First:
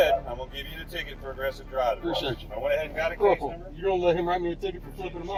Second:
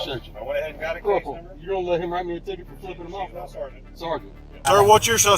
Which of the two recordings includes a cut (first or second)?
second